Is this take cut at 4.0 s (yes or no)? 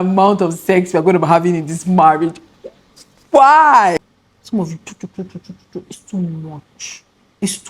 yes